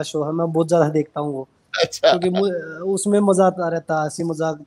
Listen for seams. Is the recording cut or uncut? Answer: uncut